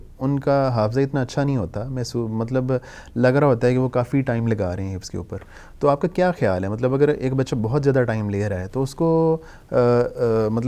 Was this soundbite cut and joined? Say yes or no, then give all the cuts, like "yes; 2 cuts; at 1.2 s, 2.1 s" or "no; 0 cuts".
no; 0 cuts